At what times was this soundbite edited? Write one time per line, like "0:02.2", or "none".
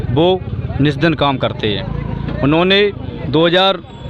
0:03.1